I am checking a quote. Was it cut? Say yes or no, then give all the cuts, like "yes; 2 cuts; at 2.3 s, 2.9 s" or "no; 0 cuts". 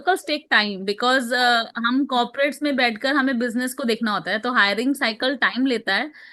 no; 0 cuts